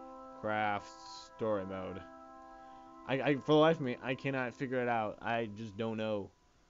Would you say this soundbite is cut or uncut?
cut